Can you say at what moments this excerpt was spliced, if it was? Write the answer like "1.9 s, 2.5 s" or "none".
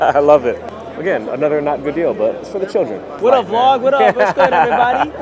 3.2 s